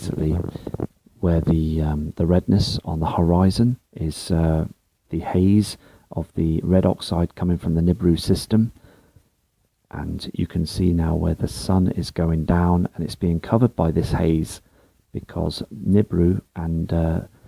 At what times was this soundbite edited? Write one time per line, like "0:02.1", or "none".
0:11.6